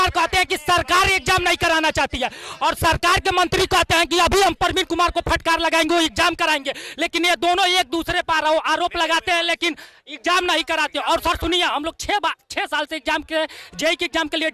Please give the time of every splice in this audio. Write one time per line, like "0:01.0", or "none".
none